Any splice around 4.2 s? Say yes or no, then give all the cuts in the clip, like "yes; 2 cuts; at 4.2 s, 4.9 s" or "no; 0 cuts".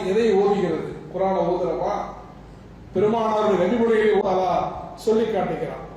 yes; 1 cut; at 4.2 s